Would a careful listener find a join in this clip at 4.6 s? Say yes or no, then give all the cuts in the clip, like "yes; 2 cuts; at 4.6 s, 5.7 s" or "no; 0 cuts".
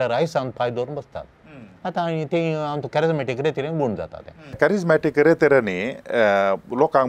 yes; 1 cut; at 4.6 s